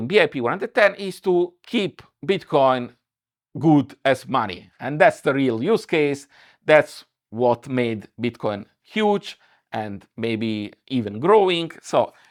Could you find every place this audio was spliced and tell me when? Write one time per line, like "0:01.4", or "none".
none